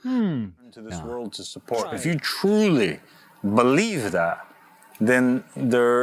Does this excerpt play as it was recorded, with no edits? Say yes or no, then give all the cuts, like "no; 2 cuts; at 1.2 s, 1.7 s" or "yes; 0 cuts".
no; 1 cut; at 1.0 s